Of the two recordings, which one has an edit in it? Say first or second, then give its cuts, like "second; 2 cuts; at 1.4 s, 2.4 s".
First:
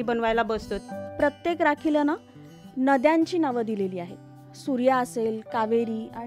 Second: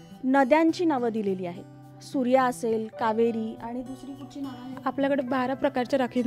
first; 1 cut; at 0.9 s